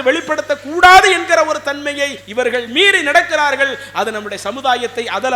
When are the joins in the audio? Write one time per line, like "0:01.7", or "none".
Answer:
0:02.2